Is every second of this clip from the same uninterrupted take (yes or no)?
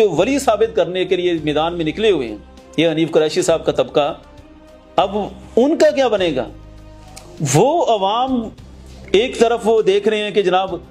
yes